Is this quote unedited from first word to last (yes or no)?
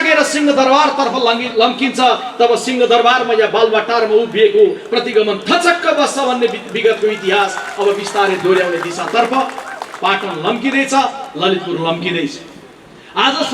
yes